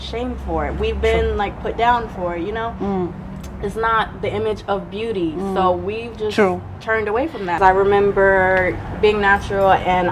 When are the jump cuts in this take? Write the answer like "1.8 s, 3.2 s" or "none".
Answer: 7.5 s